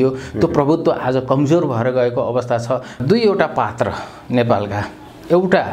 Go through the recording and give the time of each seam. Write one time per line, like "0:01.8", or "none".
0:03.0